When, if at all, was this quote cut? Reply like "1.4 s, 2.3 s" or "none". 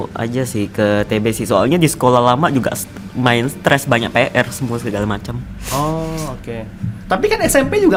none